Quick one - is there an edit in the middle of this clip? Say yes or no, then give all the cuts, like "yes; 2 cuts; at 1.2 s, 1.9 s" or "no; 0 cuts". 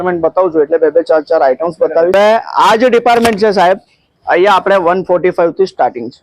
yes; 1 cut; at 2.1 s